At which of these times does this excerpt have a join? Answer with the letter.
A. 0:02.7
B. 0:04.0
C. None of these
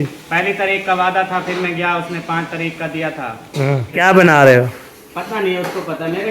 B